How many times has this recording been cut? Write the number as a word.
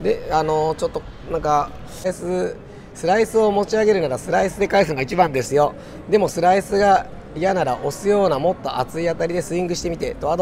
one